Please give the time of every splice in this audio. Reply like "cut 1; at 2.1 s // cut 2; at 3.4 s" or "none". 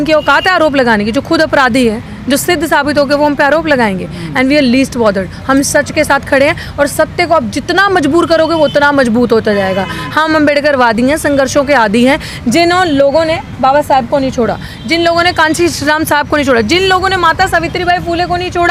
none